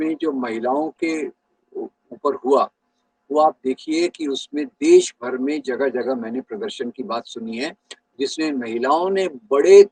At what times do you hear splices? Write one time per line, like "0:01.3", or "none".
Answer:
none